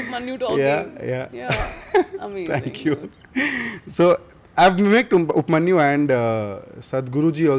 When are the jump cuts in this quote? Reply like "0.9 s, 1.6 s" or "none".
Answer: none